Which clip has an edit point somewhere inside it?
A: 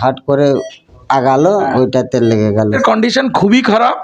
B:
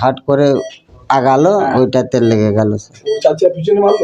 A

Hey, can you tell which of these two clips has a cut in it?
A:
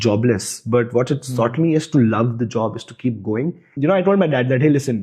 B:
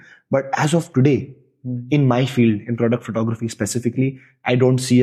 A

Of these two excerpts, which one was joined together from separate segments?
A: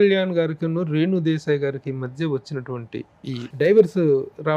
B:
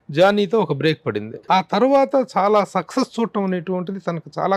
B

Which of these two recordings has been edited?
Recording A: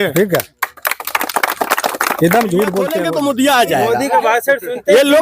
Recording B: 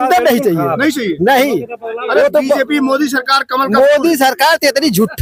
A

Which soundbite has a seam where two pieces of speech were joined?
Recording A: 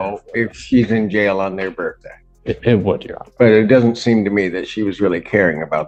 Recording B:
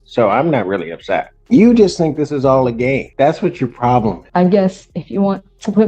B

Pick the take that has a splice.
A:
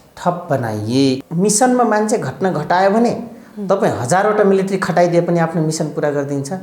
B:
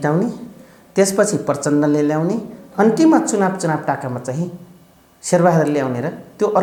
A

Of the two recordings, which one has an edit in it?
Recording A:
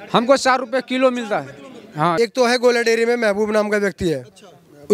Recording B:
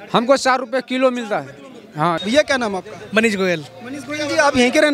A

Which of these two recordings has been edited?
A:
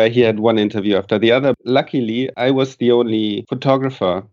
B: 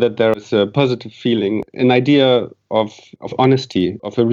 A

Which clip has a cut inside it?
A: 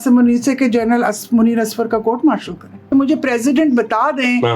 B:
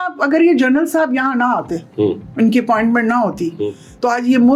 A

